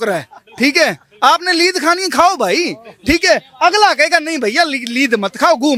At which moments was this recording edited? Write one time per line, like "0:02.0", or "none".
none